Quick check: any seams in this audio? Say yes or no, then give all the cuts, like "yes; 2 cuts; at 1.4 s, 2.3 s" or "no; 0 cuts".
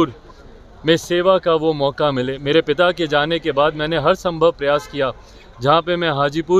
no; 0 cuts